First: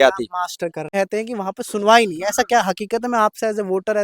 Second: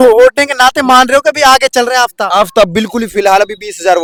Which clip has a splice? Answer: first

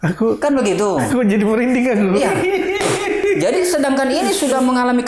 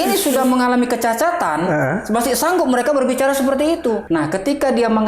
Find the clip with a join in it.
second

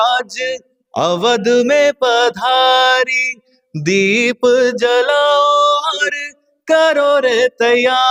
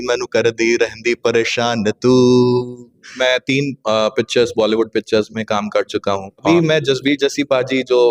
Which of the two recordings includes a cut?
second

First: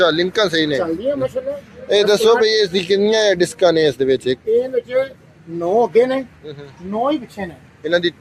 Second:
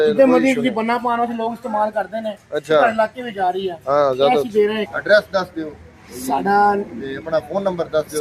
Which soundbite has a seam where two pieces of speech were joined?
second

